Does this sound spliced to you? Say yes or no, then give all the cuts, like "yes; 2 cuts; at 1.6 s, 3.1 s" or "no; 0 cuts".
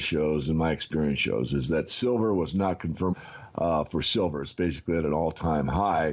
no; 0 cuts